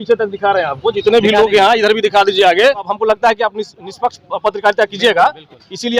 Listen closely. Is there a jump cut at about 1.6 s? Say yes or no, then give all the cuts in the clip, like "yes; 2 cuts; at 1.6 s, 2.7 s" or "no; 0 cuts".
no; 1 cut; at 2.9 s